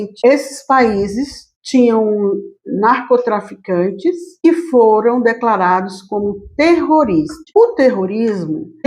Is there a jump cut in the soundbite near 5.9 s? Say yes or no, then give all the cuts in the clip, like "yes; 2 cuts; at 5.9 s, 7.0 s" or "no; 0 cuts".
no; 1 cut; at 7.4 s